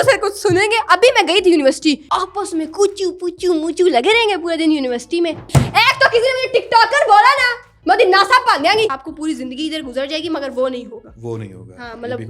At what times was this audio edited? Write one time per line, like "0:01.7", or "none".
0:02.0
0:05.5
0:08.9